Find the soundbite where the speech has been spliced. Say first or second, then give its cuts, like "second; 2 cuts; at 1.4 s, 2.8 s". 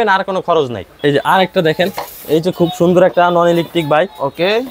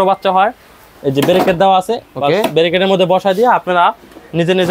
first; 1 cut; at 1.0 s